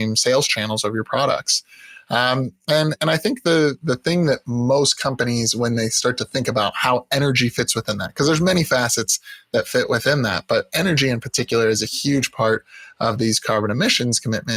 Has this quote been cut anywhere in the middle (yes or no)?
no